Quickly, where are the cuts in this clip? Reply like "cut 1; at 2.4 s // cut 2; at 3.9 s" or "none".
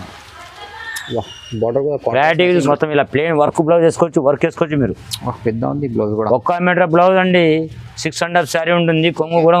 cut 1; at 2.7 s